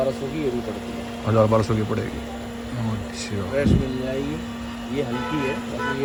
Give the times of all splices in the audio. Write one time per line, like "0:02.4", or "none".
none

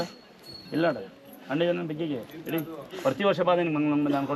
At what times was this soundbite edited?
none

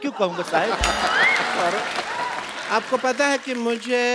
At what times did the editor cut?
0:02.5

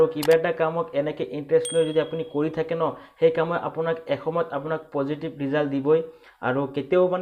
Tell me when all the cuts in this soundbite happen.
none

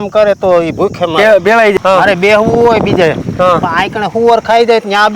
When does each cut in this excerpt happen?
0:01.7

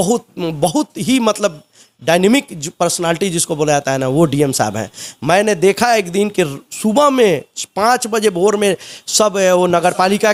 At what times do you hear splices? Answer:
none

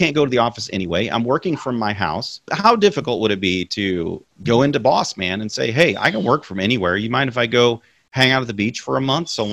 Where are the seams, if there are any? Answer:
0:02.5
0:04.3

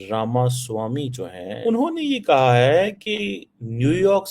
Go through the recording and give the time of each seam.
0:01.5

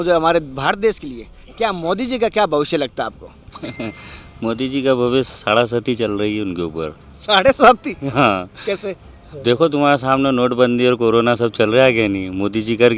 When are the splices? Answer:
none

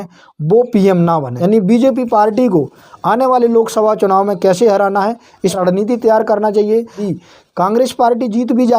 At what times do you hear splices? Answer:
0:01.3
0:05.6
0:07.1

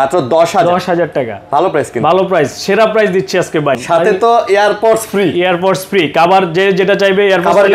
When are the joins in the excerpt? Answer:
0:03.8

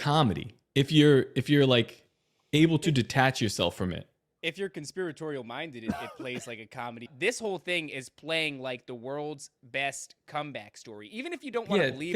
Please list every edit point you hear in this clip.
0:07.1

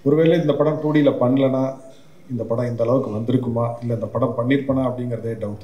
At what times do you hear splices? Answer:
none

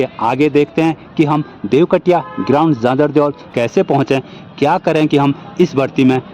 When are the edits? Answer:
0:03.4

